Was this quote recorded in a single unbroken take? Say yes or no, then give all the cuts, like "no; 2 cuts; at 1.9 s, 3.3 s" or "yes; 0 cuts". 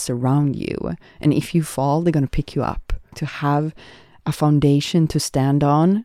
no; 1 cut; at 3.3 s